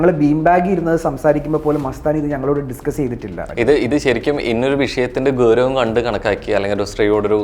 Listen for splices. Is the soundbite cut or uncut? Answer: cut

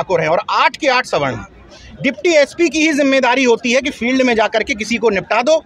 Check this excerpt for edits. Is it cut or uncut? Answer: uncut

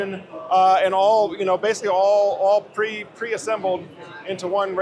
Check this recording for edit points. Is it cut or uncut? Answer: uncut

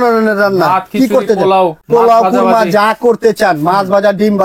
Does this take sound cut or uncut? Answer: cut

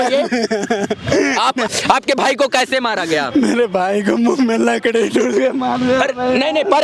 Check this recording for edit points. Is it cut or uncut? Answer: cut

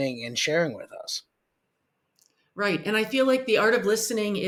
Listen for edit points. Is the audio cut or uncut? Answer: uncut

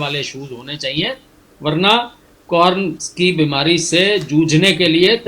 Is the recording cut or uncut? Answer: cut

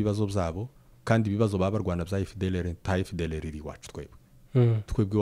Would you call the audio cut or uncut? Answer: uncut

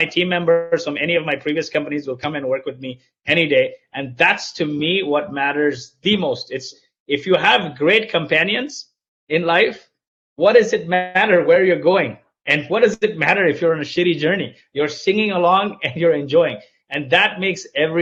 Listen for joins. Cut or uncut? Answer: uncut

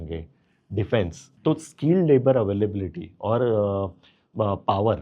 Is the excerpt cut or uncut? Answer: cut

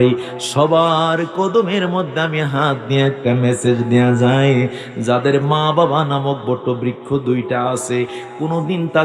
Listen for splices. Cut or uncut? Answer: uncut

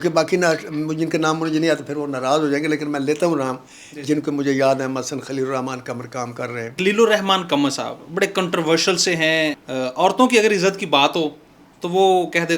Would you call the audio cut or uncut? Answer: cut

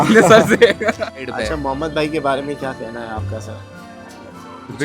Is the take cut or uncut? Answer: cut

